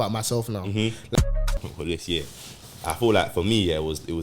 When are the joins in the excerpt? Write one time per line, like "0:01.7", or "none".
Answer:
0:01.3